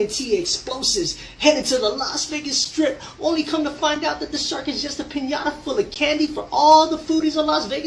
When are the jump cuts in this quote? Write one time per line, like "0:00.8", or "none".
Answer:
none